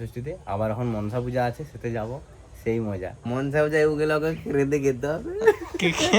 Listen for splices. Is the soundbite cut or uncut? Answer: cut